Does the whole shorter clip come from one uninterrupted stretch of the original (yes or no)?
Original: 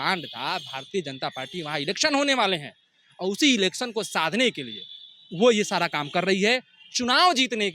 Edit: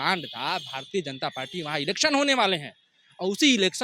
yes